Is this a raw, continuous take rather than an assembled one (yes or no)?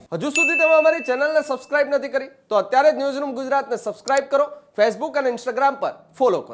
yes